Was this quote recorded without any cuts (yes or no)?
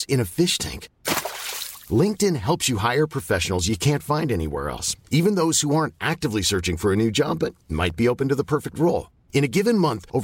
yes